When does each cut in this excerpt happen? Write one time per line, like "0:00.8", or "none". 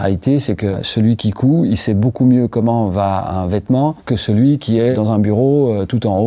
0:00.8
0:04.0
0:04.9